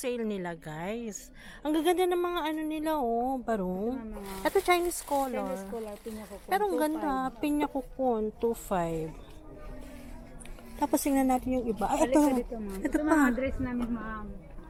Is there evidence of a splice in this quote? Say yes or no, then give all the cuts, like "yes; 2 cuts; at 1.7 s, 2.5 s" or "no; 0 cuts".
no; 0 cuts